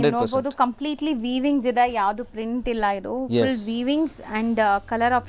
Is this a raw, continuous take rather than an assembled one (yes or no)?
yes